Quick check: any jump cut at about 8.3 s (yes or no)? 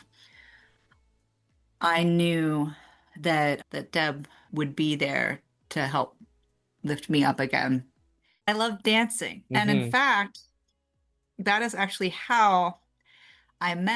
yes